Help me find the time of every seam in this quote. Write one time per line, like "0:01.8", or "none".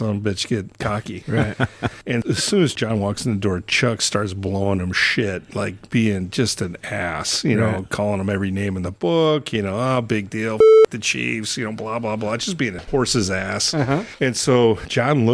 0:00.9
0:02.2
0:12.8